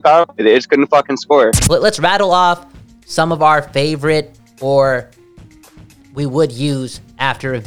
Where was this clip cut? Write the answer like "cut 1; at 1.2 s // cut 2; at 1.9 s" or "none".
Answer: cut 1; at 1.6 s